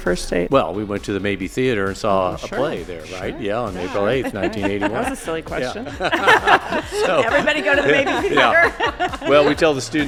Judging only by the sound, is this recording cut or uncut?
uncut